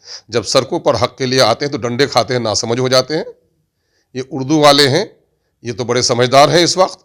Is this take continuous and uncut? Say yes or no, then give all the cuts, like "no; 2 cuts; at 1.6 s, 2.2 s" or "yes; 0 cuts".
yes; 0 cuts